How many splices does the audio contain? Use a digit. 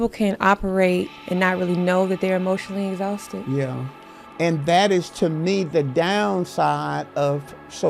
2